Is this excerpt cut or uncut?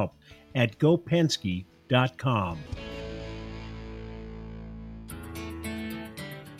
cut